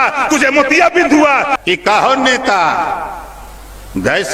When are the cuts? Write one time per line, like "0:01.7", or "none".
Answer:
0:01.5